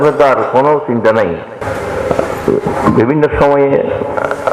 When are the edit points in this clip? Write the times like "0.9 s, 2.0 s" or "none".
1.6 s